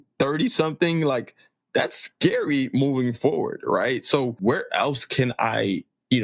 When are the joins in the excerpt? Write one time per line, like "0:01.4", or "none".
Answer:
0:04.4